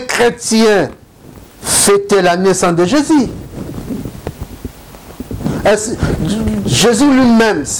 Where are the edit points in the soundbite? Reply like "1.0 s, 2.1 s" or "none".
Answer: none